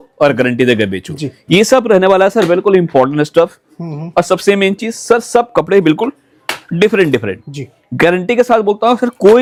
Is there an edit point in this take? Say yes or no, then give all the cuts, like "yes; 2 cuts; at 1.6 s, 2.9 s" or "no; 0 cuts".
no; 0 cuts